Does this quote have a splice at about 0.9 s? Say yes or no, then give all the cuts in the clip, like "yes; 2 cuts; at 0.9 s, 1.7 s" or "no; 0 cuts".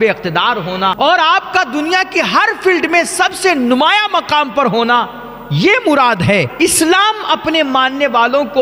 yes; 1 cut; at 0.9 s